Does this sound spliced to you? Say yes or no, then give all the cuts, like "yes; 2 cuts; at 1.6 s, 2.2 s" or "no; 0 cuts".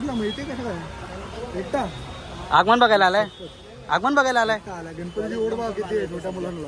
no; 0 cuts